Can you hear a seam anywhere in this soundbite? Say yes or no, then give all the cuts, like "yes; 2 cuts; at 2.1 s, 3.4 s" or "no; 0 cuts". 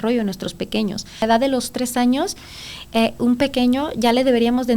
yes; 1 cut; at 1.2 s